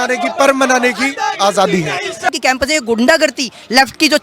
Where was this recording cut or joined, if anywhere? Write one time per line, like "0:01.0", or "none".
0:02.3